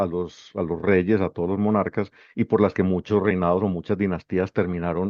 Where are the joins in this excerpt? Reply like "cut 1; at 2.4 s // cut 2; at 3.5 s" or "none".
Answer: none